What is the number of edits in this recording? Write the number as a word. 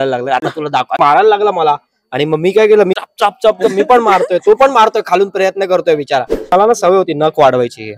three